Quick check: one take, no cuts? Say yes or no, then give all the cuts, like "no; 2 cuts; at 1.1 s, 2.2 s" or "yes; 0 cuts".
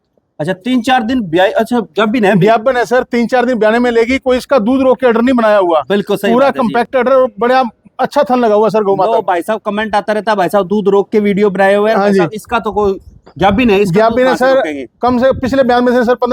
yes; 0 cuts